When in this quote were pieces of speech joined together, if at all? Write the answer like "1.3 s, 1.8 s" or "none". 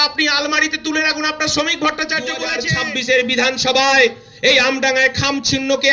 2.5 s